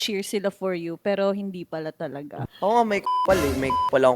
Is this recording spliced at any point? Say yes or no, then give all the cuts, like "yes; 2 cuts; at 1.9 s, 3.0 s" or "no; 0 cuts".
yes; 1 cut; at 2.4 s